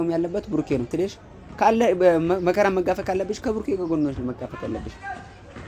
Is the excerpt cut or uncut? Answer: cut